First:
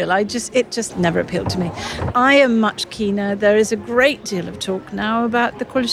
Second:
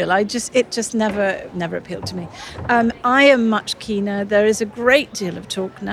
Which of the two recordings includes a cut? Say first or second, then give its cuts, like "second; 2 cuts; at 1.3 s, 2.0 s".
first; 2 cuts; at 0.9 s, 2.1 s